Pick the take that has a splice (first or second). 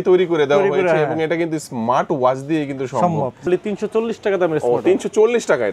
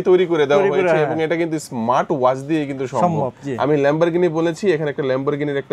first